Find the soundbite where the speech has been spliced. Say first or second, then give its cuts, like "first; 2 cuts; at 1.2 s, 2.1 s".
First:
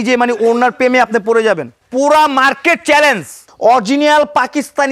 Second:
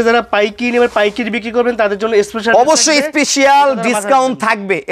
first; 2 cuts; at 1.8 s, 3.5 s